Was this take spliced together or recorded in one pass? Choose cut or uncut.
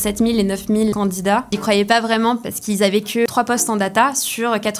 cut